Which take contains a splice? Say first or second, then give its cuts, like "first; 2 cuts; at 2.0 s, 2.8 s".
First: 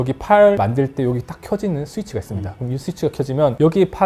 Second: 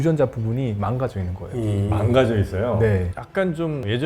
second; 1 cut; at 3.1 s